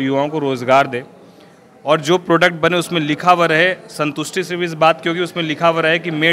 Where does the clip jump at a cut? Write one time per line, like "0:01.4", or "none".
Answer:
none